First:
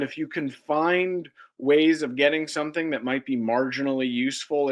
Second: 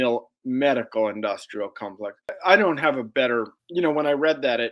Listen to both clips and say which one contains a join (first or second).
second